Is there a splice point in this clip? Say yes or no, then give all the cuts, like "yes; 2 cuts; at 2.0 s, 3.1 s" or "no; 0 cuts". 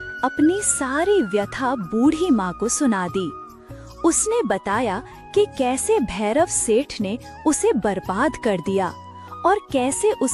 no; 0 cuts